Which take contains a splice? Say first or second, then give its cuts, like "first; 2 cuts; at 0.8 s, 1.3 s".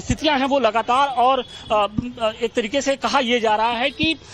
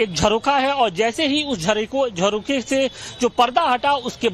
second; 1 cut; at 1.3 s